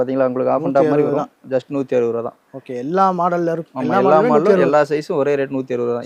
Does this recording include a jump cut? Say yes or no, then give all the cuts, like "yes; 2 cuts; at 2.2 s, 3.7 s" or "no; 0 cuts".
no; 0 cuts